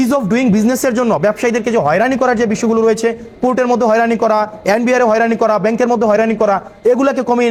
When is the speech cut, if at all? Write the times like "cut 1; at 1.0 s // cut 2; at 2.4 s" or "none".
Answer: none